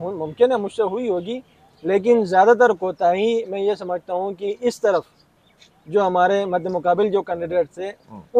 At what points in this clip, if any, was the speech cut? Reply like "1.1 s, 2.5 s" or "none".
none